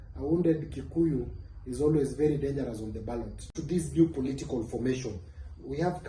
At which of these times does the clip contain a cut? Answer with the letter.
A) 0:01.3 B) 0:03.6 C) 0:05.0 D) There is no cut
B